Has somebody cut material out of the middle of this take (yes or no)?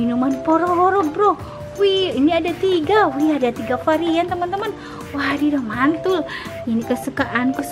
no